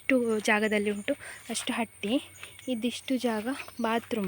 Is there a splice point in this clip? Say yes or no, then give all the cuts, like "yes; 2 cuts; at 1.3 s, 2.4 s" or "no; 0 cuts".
no; 0 cuts